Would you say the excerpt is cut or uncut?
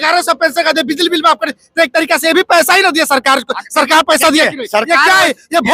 uncut